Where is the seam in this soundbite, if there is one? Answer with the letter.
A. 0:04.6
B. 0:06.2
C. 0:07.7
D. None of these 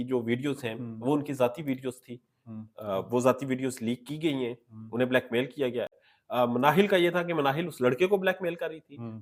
D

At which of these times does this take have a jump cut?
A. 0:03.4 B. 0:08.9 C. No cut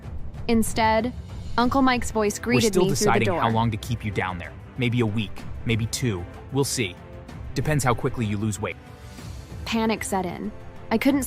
A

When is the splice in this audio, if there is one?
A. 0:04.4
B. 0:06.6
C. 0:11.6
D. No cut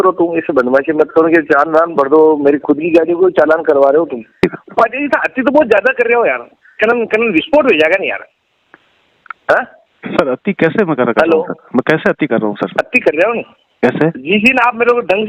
A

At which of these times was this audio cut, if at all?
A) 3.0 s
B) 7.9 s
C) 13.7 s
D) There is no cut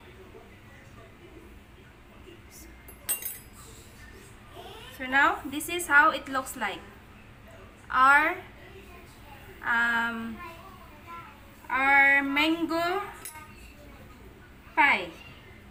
D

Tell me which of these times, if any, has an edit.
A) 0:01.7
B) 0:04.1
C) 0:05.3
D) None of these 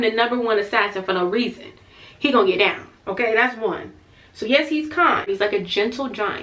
C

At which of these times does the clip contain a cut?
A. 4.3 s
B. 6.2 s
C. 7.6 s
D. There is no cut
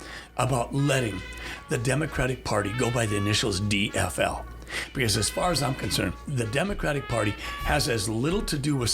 B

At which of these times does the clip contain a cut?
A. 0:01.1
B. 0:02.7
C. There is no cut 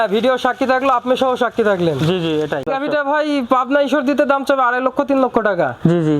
B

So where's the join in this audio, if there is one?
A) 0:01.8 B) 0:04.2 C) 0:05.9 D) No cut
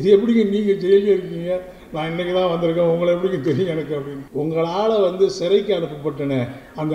B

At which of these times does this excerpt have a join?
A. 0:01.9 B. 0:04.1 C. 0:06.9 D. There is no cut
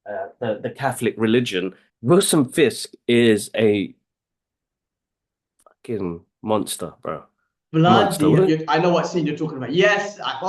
A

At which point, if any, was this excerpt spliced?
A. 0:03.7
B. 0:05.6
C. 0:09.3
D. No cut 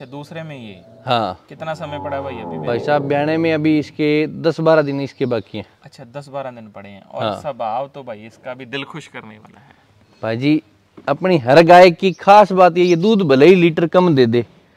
D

